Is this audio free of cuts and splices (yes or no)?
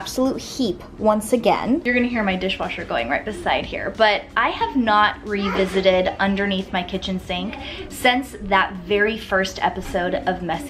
yes